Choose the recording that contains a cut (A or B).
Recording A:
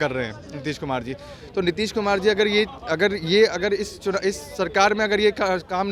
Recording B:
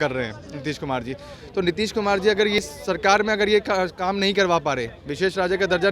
B